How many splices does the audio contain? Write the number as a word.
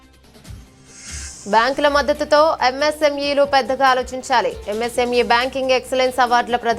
one